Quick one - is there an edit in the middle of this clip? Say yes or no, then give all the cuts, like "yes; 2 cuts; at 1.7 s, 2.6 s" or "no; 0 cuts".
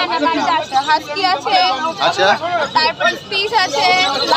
no; 0 cuts